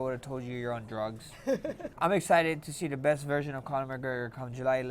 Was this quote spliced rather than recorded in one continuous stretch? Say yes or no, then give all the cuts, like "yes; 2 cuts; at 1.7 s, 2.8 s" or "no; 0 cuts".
yes; 1 cut; at 1.9 s